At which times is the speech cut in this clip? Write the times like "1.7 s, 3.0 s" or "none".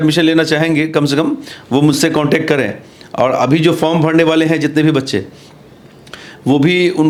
none